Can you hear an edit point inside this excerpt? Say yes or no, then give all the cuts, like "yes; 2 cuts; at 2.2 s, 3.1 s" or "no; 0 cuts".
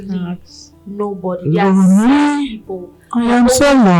no; 0 cuts